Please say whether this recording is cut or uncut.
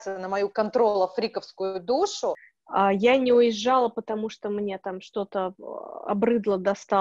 cut